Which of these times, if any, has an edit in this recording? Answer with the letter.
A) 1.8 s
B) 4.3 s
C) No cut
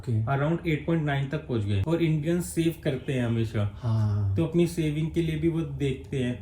A